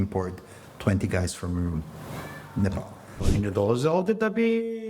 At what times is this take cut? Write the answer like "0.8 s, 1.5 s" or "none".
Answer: 3.2 s